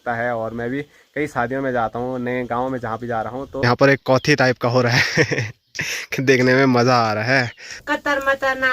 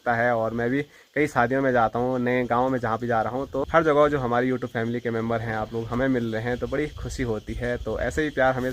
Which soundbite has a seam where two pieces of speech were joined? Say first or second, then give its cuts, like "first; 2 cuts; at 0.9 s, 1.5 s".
first; 2 cuts; at 3.5 s, 7.7 s